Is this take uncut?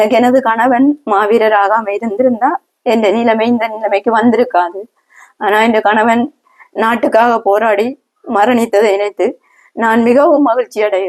yes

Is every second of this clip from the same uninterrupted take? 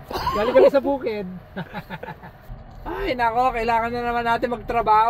no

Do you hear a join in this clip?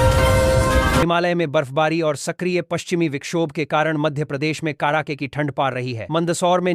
yes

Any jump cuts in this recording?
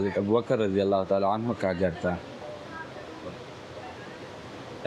no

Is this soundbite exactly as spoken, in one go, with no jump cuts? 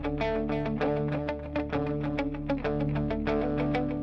yes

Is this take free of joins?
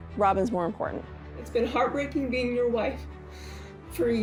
yes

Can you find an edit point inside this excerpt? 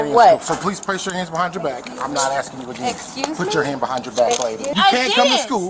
yes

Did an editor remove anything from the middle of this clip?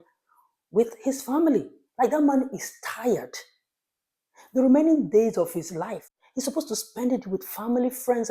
yes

